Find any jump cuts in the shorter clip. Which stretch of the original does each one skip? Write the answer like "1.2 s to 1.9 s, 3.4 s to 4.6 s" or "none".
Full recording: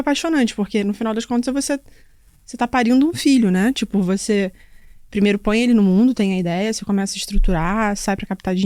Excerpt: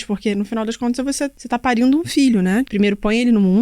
1.9 s to 2.5 s, 3.8 s to 5.1 s